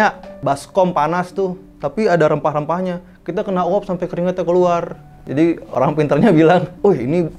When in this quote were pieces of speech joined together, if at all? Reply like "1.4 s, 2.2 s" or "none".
none